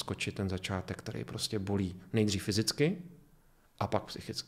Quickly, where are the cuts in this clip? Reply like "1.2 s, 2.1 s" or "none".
none